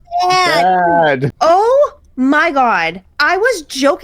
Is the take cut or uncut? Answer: cut